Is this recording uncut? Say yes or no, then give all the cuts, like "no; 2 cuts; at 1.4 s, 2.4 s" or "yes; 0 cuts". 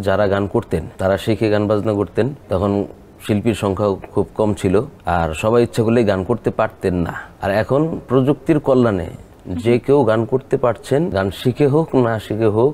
no; 5 cuts; at 0.9 s, 2.4 s, 5.0 s, 7.2 s, 11.1 s